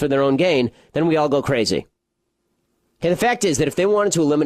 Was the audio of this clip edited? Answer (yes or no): no